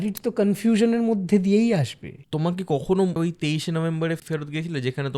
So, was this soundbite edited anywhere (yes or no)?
yes